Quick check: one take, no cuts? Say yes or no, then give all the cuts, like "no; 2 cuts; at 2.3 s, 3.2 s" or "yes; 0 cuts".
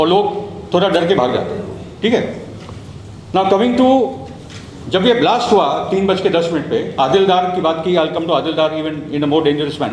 yes; 0 cuts